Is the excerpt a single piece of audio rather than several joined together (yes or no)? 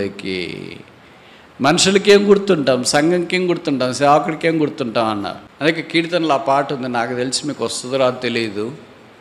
no